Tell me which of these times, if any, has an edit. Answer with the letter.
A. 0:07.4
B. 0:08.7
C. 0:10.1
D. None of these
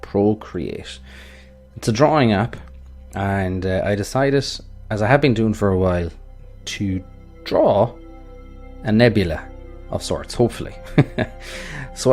B